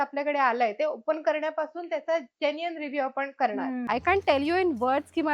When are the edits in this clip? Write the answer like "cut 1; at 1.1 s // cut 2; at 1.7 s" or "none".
cut 1; at 3.8 s